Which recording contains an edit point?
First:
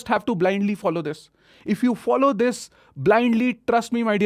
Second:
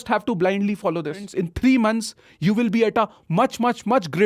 second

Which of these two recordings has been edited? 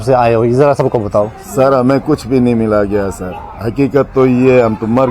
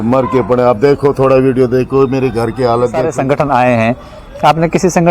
second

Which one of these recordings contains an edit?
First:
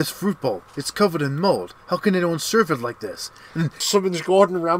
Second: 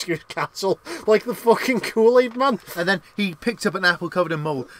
first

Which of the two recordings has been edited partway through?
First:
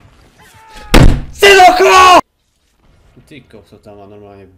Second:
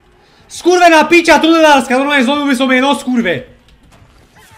first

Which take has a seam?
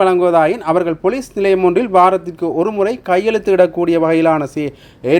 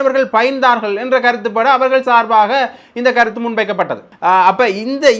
second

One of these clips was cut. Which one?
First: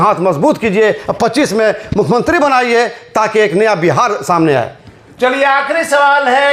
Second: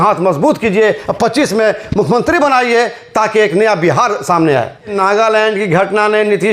second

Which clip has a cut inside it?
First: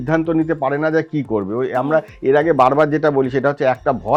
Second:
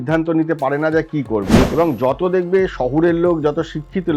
second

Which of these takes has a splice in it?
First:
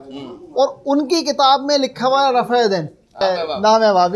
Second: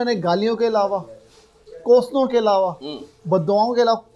first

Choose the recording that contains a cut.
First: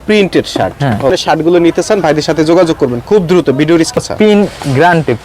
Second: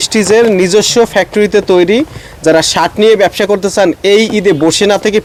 first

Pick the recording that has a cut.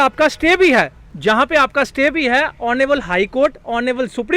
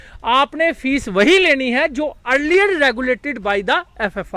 first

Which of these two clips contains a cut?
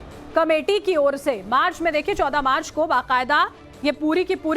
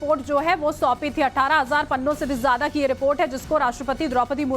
first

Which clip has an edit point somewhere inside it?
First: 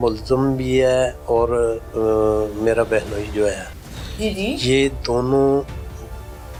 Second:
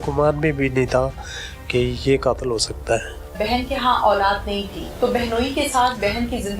second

